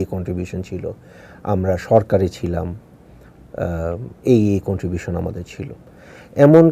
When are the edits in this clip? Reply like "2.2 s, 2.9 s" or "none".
none